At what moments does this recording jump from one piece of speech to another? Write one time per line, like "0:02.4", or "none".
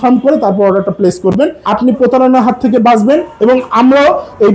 0:01.6